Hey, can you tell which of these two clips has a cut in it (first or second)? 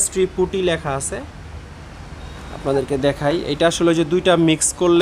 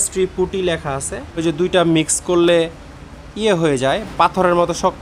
second